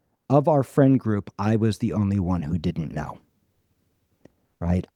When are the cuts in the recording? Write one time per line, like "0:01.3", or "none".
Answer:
none